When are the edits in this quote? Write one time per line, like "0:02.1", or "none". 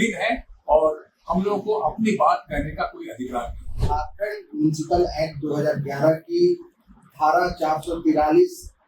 0:03.8